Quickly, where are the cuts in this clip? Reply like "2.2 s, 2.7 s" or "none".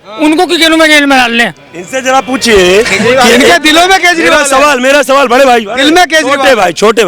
none